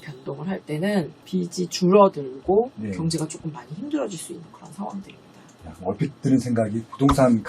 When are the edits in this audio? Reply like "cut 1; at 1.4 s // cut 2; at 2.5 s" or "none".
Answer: cut 1; at 1.2 s